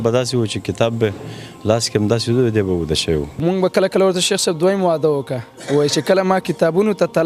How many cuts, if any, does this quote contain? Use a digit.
1